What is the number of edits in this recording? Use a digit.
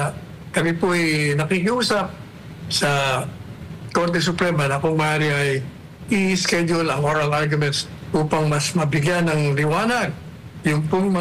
0